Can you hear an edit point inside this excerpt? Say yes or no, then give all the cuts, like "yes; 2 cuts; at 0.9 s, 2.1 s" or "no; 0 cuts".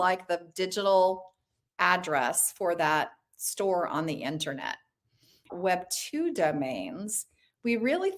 yes; 1 cut; at 5.5 s